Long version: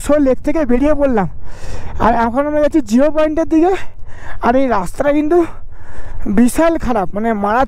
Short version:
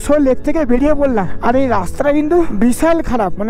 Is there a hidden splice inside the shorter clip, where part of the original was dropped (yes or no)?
yes